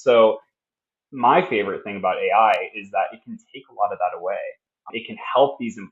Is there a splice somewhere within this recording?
yes; 1 cut; at 4.9 s

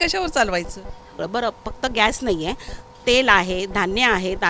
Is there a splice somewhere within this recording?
yes; 1 cut; at 1.2 s

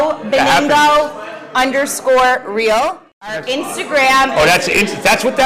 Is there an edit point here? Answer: yes; 1 cut; at 3.0 s

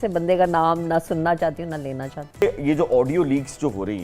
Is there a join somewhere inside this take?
yes; 1 cut; at 2.4 s

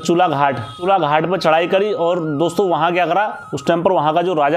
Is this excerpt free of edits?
yes; 0 cuts

